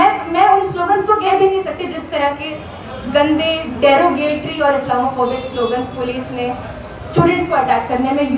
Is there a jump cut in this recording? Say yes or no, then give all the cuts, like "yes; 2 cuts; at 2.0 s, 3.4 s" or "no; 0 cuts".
no; 0 cuts